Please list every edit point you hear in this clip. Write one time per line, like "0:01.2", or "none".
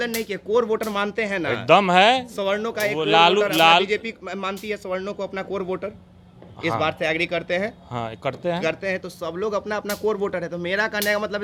none

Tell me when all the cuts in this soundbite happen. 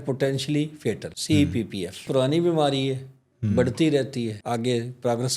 0:01.1
0:02.1
0:04.4

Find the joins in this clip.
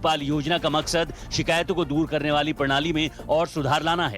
0:02.7

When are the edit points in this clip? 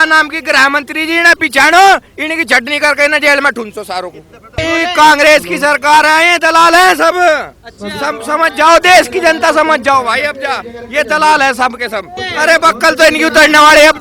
0:04.6
0:12.2

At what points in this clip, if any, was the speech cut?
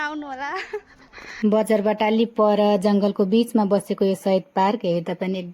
0:01.2

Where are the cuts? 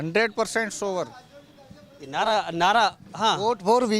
none

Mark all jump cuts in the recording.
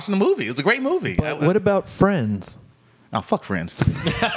none

